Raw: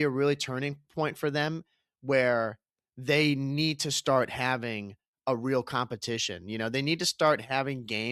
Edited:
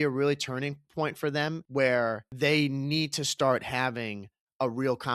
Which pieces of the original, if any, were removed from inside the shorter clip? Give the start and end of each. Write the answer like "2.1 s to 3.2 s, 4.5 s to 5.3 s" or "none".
1.6 s to 1.9 s, 2.6 s to 2.9 s